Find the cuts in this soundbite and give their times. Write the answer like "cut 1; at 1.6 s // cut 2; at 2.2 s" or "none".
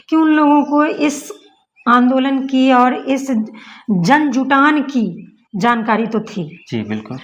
none